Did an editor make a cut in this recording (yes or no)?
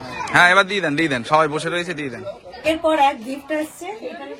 yes